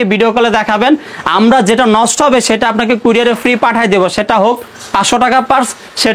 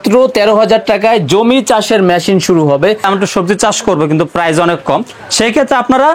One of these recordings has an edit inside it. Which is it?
second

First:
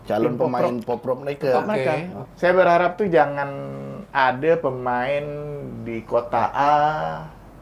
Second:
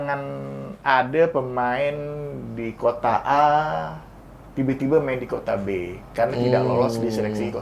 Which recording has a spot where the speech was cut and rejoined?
first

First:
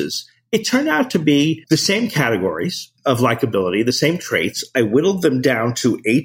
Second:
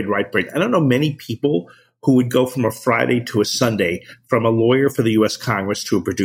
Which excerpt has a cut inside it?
first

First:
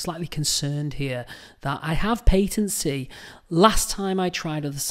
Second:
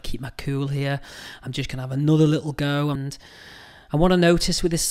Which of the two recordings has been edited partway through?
second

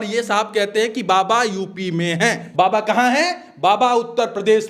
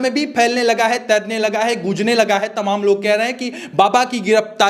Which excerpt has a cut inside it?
first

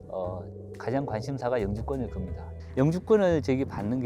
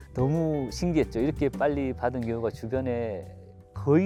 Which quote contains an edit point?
first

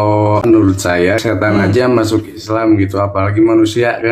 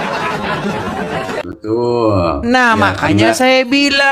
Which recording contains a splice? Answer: first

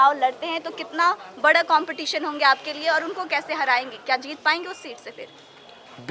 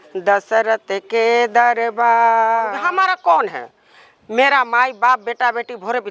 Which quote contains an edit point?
second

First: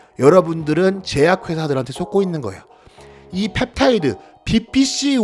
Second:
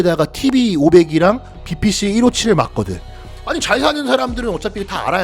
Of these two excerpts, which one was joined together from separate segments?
second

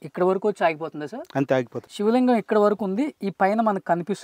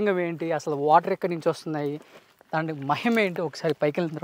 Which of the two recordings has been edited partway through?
first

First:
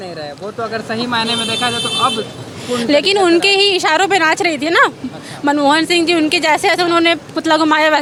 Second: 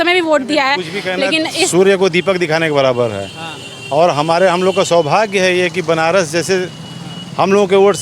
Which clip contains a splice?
second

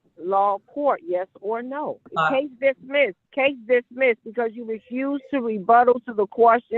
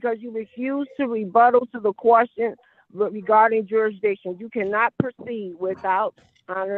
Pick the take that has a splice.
first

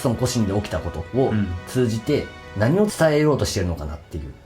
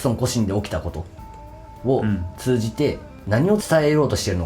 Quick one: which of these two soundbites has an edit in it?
first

